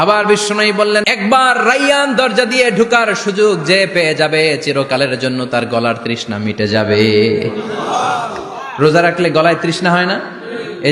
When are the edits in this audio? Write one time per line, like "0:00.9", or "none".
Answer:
0:01.1